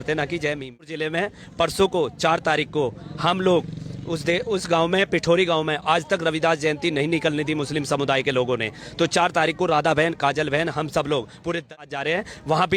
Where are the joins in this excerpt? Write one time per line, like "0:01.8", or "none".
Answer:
0:01.2
0:11.8